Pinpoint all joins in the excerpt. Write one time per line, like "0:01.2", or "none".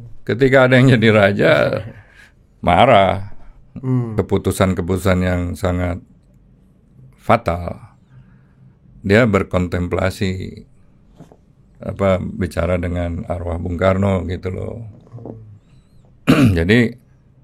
0:04.1

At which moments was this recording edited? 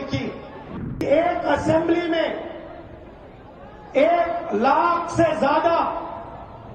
0:01.0

